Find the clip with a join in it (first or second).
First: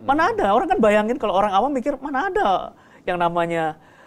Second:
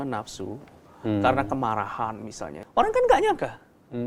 second